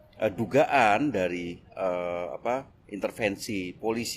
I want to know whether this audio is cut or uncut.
uncut